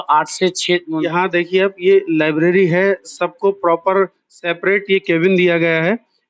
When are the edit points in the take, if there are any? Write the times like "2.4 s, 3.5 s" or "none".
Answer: 1.0 s